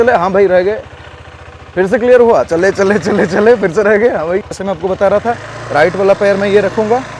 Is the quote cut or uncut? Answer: cut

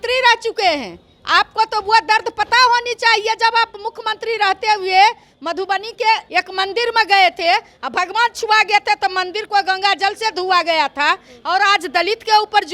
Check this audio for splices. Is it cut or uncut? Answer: cut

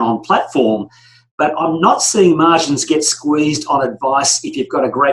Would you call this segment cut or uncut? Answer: uncut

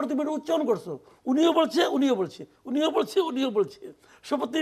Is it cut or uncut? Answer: uncut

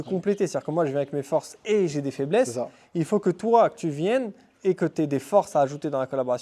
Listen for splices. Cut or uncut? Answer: uncut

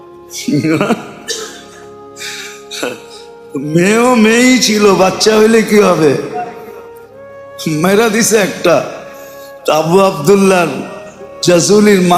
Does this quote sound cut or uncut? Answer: uncut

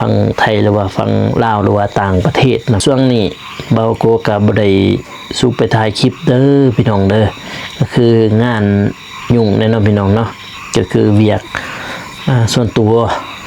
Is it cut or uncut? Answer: cut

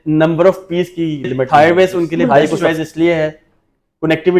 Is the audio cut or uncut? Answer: cut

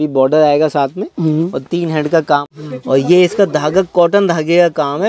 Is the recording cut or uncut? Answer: cut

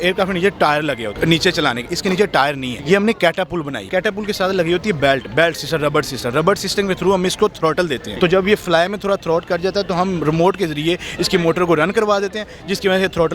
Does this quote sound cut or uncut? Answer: cut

